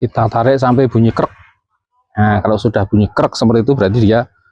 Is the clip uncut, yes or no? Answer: yes